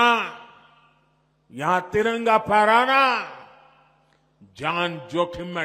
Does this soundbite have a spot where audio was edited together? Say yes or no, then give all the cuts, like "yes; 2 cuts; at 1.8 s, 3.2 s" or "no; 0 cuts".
no; 0 cuts